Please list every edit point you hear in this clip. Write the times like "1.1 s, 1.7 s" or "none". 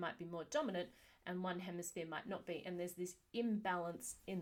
none